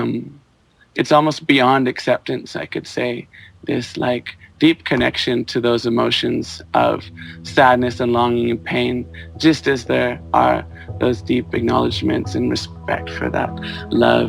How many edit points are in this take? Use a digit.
0